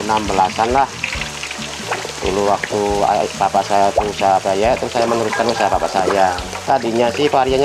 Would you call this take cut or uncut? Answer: uncut